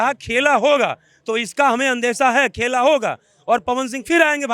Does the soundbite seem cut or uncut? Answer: uncut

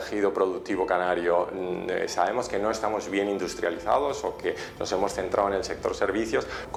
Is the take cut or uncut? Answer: uncut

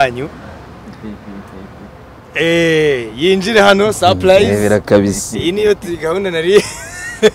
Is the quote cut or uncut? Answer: uncut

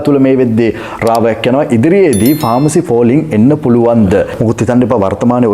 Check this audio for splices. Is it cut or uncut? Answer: cut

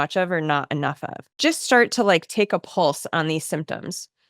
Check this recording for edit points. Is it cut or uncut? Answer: cut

